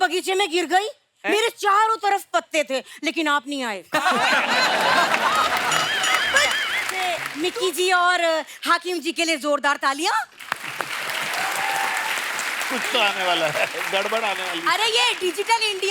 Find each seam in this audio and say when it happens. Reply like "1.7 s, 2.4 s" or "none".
6.9 s